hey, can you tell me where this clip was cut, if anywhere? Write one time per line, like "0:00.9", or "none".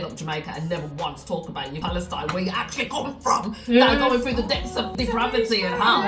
0:01.8
0:04.9